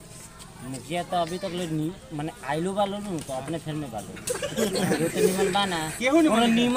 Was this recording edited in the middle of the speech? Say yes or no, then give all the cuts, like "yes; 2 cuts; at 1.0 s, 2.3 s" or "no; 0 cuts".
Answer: no; 0 cuts